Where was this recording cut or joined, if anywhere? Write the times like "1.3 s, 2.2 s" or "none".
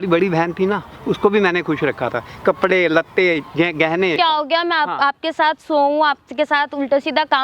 4.2 s